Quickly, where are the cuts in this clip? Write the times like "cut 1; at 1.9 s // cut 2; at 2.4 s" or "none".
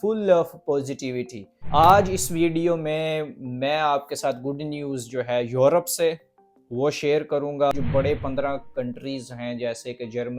cut 1; at 1.6 s // cut 2; at 7.7 s